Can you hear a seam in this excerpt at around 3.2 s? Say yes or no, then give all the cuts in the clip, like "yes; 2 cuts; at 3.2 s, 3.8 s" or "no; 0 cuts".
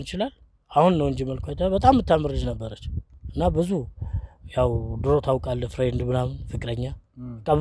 no; 0 cuts